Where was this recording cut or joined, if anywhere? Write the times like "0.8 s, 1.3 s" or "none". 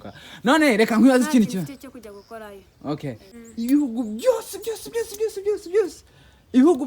3.3 s